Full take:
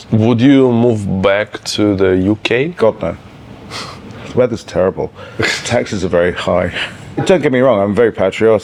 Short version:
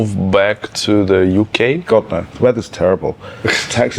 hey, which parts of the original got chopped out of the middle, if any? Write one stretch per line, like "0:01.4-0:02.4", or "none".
0:03.2-0:04.2